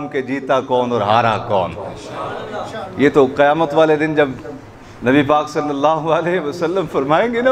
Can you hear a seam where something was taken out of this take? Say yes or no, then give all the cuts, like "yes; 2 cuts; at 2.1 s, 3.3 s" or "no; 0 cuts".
no; 0 cuts